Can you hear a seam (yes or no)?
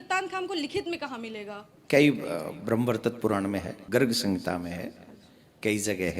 yes